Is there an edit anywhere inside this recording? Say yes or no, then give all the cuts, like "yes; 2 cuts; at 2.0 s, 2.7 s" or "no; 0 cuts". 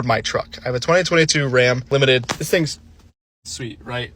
yes; 1 cut; at 1.8 s